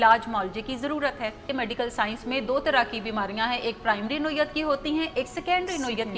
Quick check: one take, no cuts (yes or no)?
no